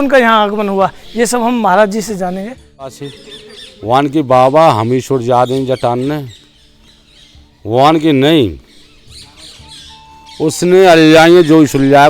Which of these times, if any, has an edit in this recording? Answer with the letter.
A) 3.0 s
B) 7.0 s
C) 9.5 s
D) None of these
A